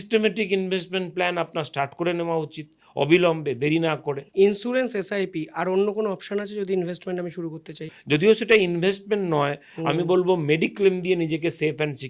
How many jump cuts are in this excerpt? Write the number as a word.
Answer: two